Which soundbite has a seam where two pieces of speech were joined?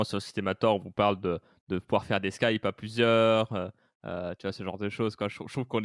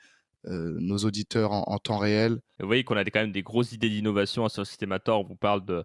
second; 1 cut; at 2.5 s

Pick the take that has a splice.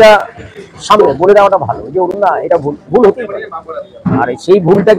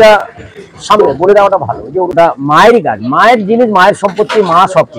second; 1 cut; at 2.1 s

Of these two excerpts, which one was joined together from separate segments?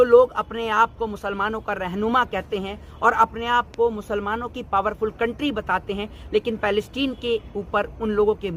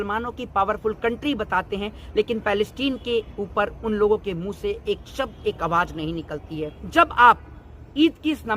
second; 1 cut; at 6.8 s

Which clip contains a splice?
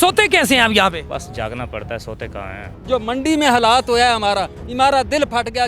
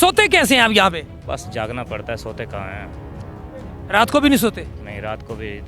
first; 2 cuts; at 1.0 s, 2.7 s

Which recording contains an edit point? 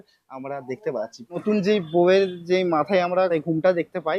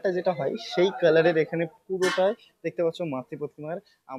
first; 2 cuts; at 1.4 s, 3.3 s

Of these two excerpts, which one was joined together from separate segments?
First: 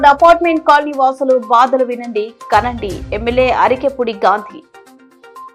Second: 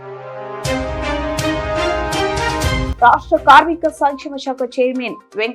second; 1 cut; at 2.9 s

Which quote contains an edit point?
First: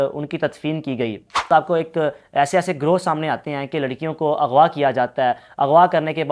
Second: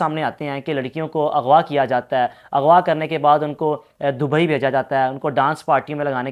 first; 1 cut; at 1.5 s

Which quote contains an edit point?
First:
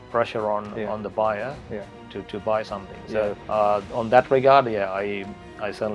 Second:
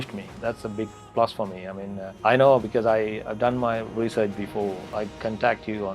second; 1 cut; at 4.9 s

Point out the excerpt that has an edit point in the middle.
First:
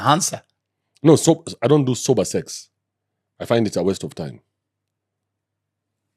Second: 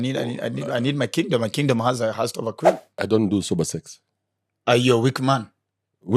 second; 1 cut; at 3.0 s

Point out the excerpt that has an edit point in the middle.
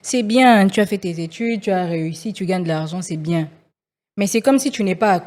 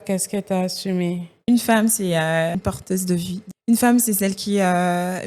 second; 2 cuts; at 1.4 s, 3.1 s

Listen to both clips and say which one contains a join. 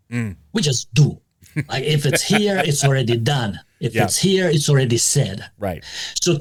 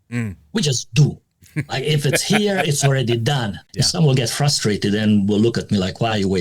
second; 1 cut; at 3.6 s

